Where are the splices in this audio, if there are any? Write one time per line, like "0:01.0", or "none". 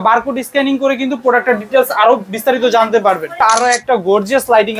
0:03.4